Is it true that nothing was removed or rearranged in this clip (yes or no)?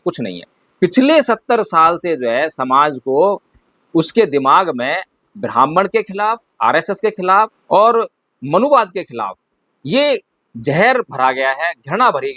yes